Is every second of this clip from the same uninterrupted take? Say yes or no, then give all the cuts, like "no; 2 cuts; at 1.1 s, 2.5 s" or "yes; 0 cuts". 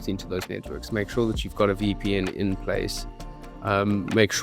yes; 0 cuts